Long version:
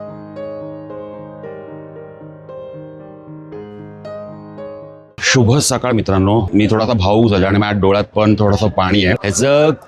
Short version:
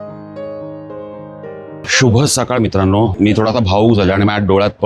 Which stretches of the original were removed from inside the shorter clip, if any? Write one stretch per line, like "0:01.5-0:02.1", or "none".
0:01.8-0:05.2